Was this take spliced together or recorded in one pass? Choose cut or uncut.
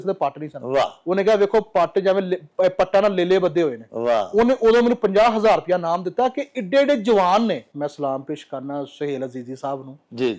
cut